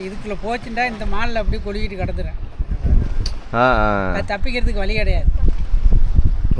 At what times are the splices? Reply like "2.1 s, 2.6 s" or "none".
none